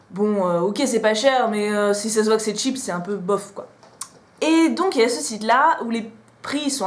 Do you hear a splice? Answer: no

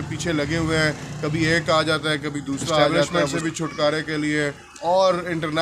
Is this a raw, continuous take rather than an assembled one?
no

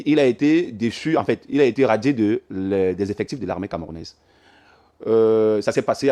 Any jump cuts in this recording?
no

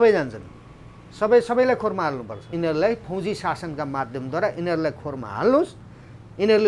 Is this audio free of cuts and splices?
no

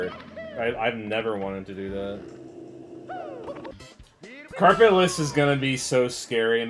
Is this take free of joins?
no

